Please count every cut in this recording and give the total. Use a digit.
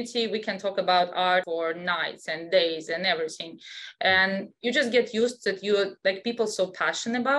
1